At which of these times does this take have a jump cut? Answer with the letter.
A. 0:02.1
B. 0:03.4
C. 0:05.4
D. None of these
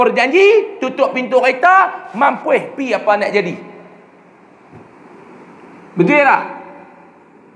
D